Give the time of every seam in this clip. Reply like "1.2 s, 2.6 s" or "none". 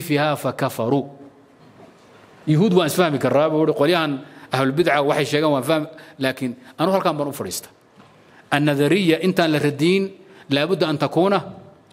1.6 s